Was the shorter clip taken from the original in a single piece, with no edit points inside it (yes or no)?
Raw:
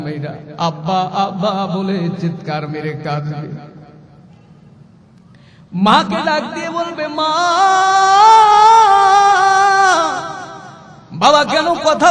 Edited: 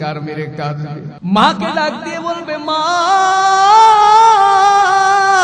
no